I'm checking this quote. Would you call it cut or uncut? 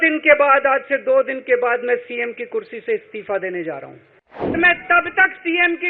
cut